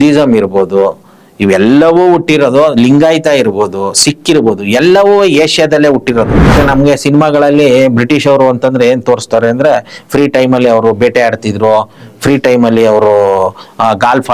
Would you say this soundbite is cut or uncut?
cut